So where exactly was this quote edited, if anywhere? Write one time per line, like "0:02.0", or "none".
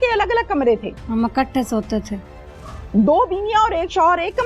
0:00.9